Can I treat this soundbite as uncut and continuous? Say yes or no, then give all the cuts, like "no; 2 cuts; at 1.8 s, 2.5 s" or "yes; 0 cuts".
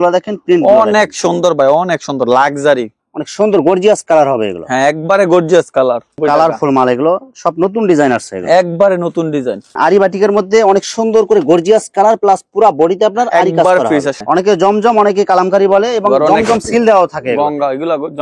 no; 4 cuts; at 2.9 s, 6.2 s, 9.6 s, 14.1 s